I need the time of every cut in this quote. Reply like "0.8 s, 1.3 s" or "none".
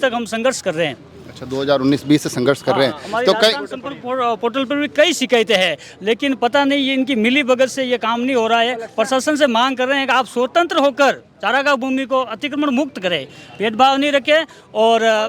none